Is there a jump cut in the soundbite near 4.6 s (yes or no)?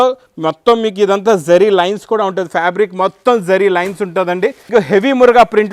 yes